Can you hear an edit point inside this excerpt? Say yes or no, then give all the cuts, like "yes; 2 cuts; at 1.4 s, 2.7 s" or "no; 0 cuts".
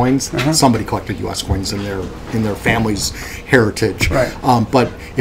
yes; 1 cut; at 4.1 s